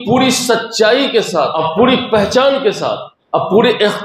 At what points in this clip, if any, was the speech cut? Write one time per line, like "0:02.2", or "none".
0:01.5
0:03.1